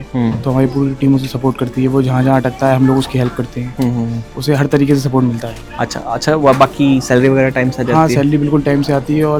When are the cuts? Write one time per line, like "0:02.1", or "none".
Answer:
none